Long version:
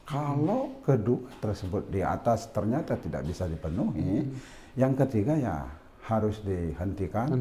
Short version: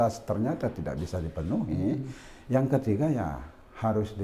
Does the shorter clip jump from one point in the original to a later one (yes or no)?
no